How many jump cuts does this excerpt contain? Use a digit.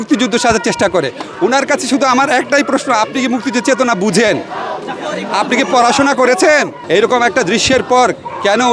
1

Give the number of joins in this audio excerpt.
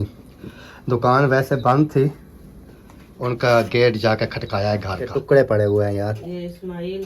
1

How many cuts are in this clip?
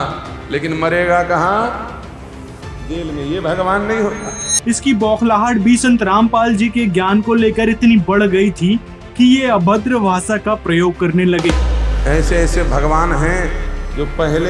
0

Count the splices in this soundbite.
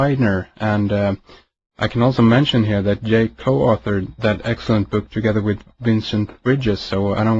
1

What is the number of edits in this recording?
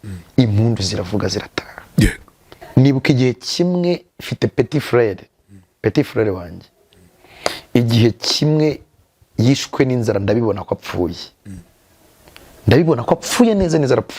1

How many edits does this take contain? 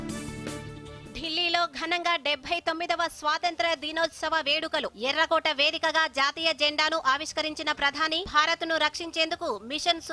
1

